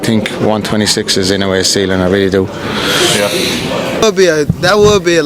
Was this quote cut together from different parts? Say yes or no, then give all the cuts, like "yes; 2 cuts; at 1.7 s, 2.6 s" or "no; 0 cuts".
yes; 1 cut; at 4.0 s